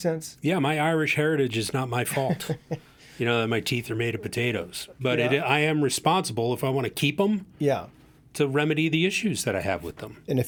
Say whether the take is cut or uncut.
uncut